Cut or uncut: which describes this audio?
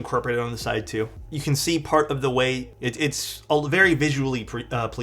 uncut